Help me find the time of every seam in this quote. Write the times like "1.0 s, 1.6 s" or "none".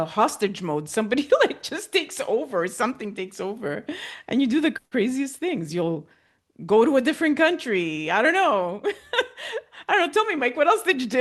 none